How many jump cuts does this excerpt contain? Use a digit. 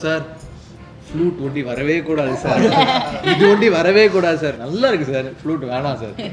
0